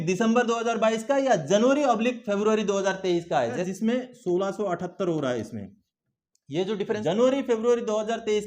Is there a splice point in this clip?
yes; 2 cuts; at 3.6 s, 7.0 s

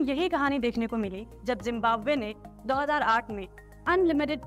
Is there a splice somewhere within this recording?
no; 0 cuts

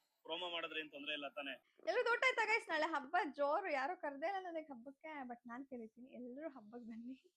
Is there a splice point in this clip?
yes; 1 cut; at 1.6 s

